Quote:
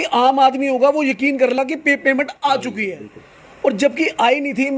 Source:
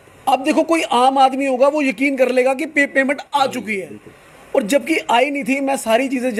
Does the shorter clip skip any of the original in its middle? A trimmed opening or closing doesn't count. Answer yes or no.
yes